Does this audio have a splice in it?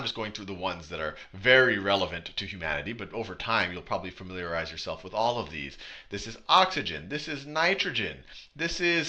yes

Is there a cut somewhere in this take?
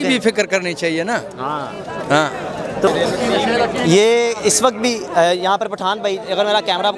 yes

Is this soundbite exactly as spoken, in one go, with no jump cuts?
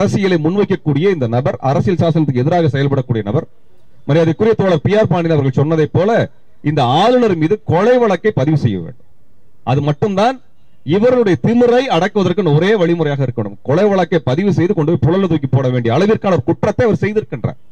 yes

